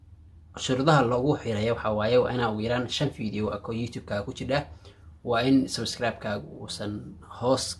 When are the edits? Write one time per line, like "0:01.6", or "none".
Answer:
none